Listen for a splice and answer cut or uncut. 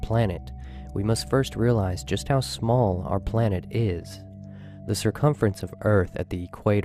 cut